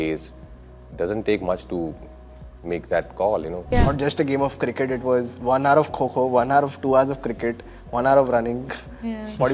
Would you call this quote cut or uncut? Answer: cut